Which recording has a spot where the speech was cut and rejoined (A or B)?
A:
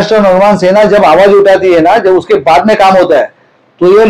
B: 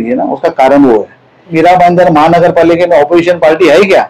B